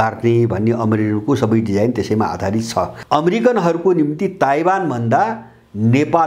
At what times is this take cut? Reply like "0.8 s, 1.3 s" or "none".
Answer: 3.0 s